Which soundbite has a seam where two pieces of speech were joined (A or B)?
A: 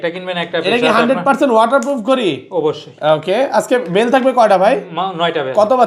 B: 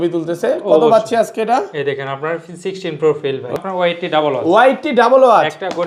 B